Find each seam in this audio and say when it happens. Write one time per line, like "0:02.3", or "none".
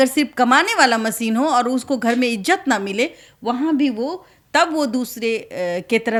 none